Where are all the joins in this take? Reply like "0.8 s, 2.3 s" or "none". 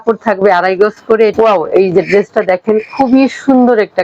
1.3 s

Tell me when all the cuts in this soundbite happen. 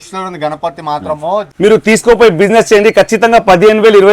1.4 s

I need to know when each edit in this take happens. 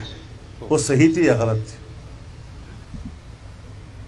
2.9 s

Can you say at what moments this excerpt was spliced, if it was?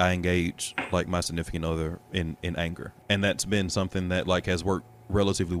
2.9 s

